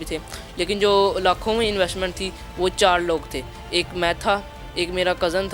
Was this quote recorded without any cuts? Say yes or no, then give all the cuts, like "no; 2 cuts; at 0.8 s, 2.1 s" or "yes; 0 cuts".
yes; 0 cuts